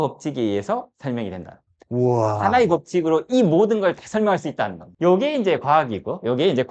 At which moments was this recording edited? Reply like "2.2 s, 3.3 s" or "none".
4.9 s